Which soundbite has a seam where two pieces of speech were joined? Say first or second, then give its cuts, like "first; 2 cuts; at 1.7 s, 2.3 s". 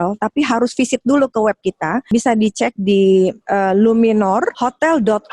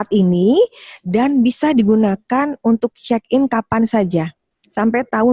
first; 3 cuts; at 2.0 s, 3.4 s, 4.5 s